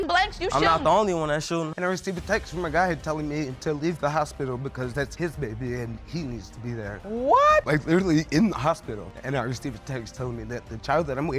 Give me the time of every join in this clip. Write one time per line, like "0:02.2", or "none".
0:01.7